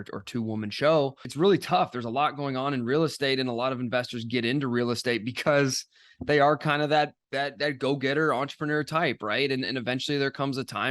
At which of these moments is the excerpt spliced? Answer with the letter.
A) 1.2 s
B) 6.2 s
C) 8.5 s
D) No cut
A